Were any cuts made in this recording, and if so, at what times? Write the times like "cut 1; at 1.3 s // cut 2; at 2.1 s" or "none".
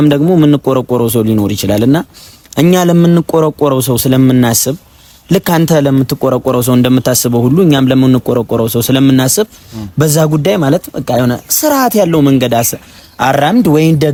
none